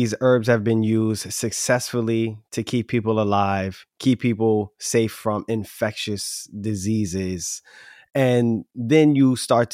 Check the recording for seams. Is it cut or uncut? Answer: uncut